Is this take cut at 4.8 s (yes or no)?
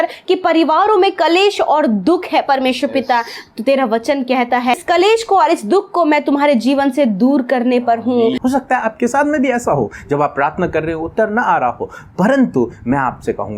yes